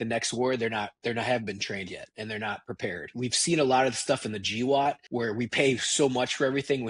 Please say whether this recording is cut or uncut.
cut